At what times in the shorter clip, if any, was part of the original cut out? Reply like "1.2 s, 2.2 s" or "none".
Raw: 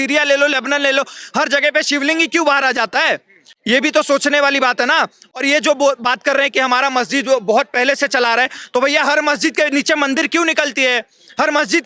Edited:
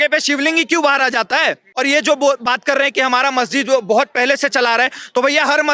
1.7 s